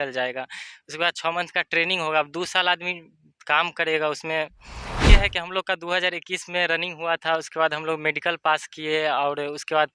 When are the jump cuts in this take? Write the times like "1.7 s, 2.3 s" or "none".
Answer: 5.1 s

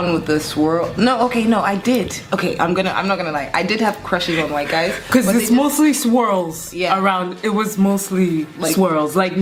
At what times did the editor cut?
none

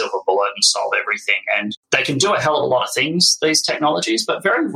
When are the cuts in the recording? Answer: 1.8 s

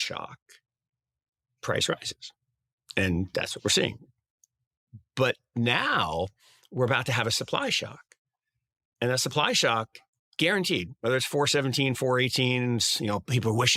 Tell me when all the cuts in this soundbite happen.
none

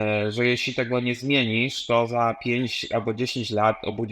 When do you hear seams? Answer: none

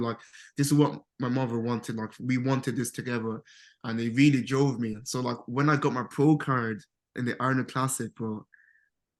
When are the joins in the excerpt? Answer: none

